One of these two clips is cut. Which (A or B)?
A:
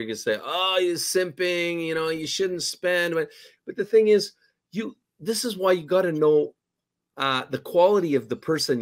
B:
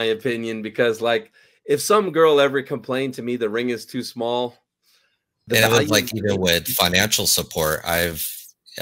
B